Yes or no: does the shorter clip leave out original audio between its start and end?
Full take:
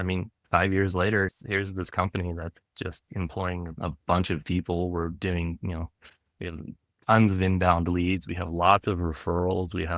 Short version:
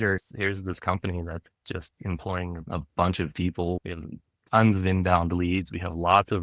yes